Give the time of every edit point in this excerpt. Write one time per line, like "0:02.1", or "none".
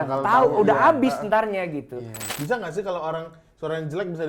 0:02.2